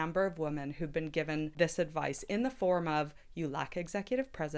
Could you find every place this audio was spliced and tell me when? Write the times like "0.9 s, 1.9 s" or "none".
1.5 s